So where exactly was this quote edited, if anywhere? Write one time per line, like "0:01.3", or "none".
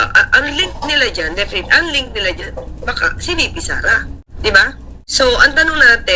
0:04.2
0:04.9